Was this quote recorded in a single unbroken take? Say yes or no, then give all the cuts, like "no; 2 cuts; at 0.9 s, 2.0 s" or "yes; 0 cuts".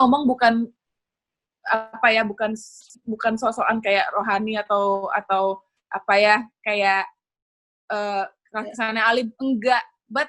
yes; 0 cuts